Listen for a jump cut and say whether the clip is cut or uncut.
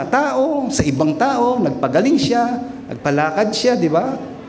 uncut